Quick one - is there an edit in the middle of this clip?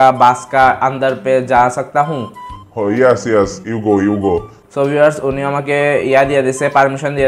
no; 0 cuts

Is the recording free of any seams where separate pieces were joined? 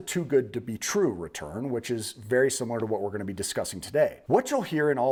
yes; 0 cuts

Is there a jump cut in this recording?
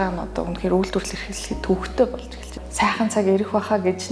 yes; 1 cut; at 2.6 s

